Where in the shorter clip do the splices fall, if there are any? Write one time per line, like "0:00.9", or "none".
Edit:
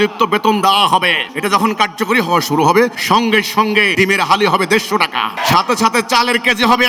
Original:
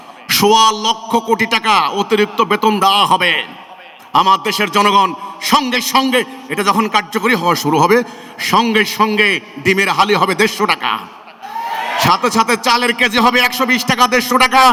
0:01.3
0:03.0
0:03.9
0:05.4